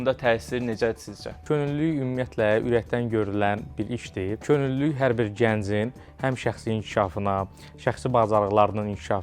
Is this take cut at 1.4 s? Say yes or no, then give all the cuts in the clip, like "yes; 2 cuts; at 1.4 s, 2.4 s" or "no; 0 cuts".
yes; 2 cuts; at 1.4 s, 4.4 s